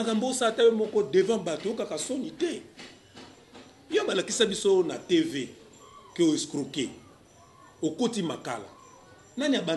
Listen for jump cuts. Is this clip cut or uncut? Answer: uncut